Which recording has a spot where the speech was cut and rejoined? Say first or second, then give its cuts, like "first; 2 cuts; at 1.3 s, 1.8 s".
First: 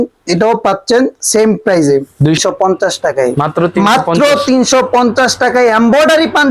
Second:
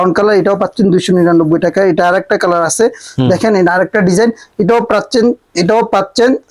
first; 1 cut; at 2.4 s